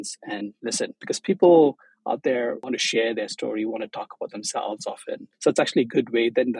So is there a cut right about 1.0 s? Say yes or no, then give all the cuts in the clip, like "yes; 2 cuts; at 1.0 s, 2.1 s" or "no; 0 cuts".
yes; 3 cuts; at 1.0 s, 2.6 s, 5.3 s